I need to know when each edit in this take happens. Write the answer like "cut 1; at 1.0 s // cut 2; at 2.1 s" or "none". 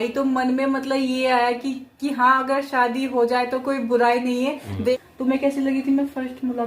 cut 1; at 4.9 s